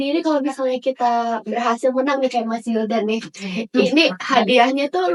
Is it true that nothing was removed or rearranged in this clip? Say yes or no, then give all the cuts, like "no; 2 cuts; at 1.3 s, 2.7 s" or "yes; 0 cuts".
yes; 0 cuts